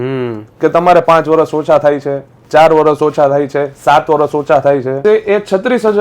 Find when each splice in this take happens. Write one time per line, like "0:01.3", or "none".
0:05.0

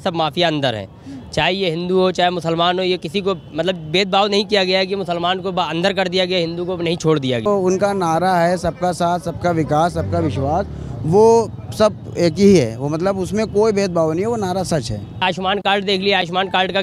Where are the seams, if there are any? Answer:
0:07.4
0:15.2

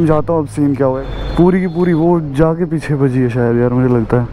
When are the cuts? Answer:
0:01.0

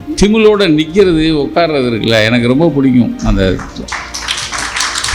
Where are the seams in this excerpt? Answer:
none

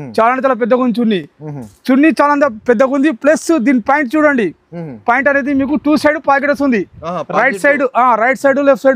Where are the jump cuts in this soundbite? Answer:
none

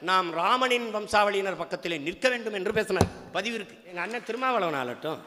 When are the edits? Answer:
0:04.0

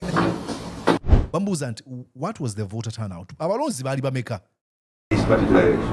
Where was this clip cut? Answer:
0:01.0

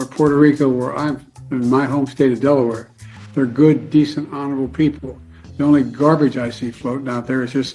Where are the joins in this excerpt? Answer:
none

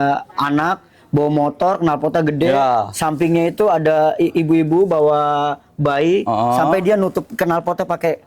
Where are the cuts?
none

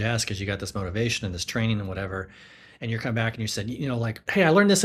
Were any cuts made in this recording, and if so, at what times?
none

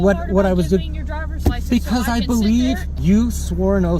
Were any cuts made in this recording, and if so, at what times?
0:02.9

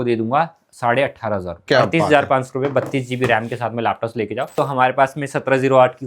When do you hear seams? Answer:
0:01.5
0:04.6

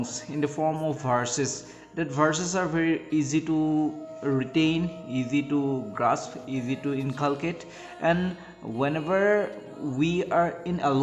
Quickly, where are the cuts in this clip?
none

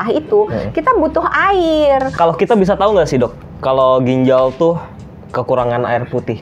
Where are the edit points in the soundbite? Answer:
0:02.1

